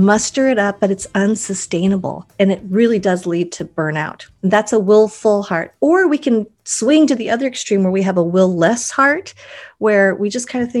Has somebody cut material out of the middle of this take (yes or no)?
yes